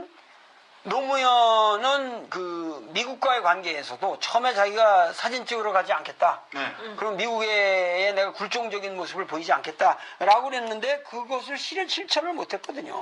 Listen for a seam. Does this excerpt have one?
yes; 1 cut; at 10.1 s

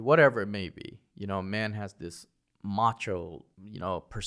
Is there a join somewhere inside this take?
no; 0 cuts

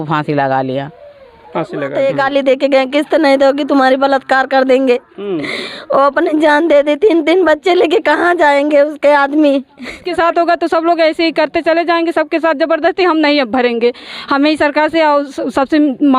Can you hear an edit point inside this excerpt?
yes; 2 cuts; at 1.9 s, 10.1 s

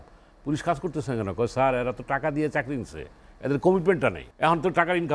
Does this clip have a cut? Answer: yes; 1 cut; at 4.3 s

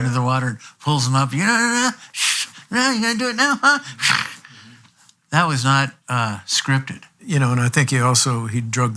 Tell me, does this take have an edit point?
yes; 1 cut; at 7.2 s

